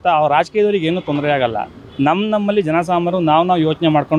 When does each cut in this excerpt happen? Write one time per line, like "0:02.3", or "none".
none